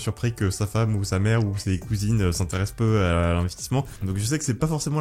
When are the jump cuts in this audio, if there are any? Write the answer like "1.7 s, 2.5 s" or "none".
4.0 s